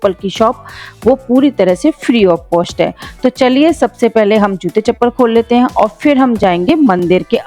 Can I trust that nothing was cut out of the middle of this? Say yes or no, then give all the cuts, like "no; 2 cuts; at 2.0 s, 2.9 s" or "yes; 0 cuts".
yes; 0 cuts